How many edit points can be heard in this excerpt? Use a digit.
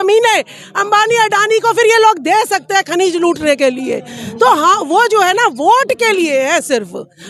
0